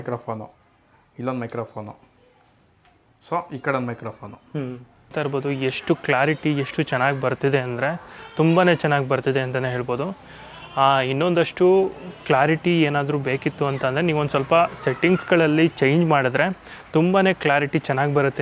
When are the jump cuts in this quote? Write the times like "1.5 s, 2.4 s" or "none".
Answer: 5.1 s